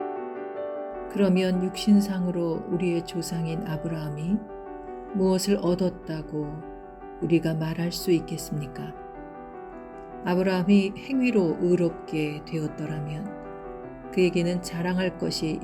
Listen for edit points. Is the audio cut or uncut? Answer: cut